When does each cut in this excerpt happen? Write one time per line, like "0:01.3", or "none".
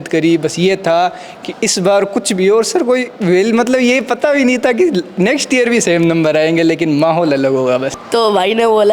0:07.9